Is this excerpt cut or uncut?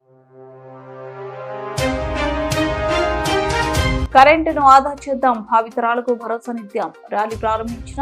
cut